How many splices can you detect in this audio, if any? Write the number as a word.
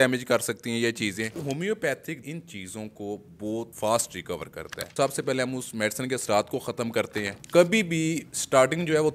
five